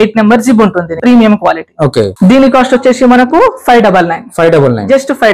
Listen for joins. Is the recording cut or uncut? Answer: cut